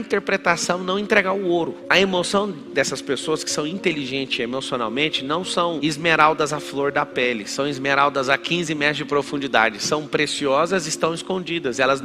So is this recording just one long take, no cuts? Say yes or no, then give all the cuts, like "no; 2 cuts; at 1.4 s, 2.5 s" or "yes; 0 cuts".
yes; 0 cuts